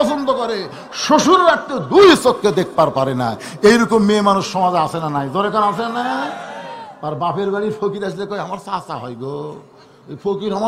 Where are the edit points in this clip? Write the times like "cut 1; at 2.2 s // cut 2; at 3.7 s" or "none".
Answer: none